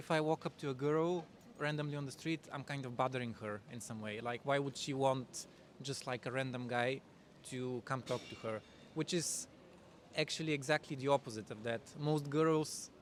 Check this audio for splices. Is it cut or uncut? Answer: uncut